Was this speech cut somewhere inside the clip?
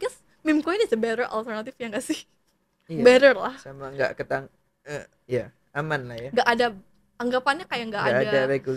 no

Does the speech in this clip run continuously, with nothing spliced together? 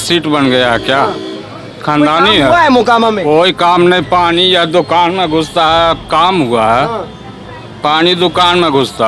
yes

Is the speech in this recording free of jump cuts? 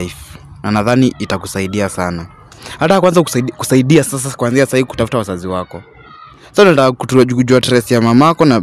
yes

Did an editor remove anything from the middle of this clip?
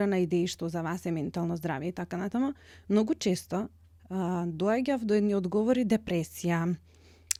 no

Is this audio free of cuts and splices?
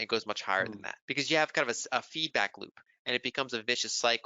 no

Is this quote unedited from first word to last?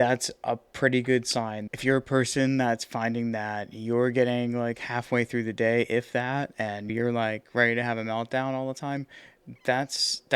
no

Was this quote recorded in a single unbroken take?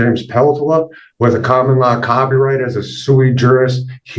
yes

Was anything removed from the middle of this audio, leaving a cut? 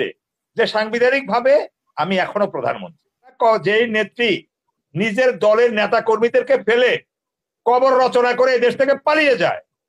yes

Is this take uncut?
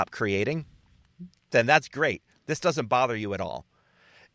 yes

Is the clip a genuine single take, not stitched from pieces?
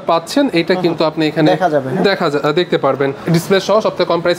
no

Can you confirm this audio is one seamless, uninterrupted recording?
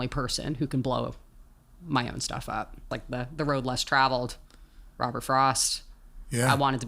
no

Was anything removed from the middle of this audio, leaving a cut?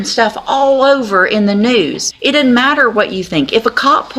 yes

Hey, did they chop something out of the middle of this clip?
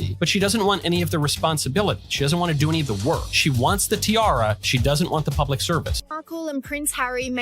yes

